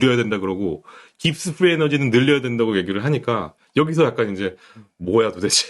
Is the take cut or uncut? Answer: uncut